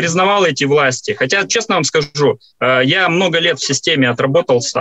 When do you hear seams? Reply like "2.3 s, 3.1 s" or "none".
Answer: none